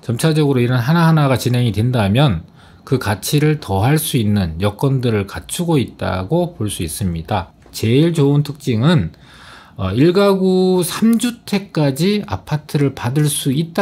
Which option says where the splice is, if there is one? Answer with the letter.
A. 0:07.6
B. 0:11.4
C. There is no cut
A